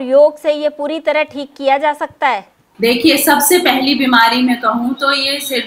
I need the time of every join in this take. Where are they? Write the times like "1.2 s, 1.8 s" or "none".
2.6 s